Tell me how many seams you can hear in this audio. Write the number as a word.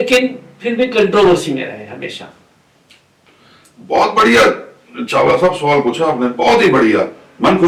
zero